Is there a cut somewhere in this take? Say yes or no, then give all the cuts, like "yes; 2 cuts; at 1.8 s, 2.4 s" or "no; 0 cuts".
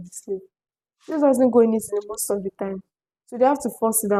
no; 0 cuts